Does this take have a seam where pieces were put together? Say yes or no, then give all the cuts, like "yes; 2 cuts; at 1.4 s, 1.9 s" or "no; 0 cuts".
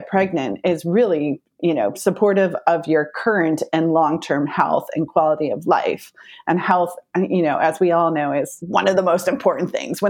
yes; 1 cut; at 8.6 s